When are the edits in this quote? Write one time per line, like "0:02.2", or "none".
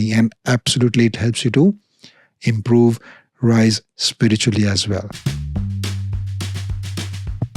0:05.2